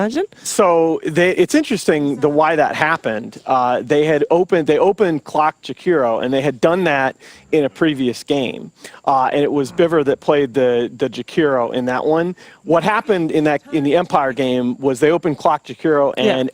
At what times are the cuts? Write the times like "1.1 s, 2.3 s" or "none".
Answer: 8.3 s